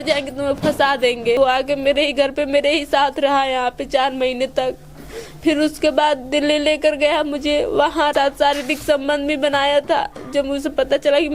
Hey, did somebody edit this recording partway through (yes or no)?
yes